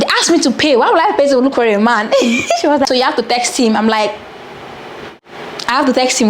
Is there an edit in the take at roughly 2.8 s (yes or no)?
yes